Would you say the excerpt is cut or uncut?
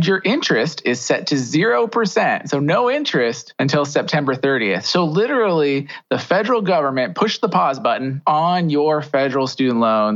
cut